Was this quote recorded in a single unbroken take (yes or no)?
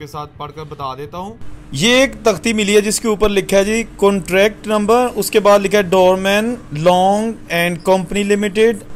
yes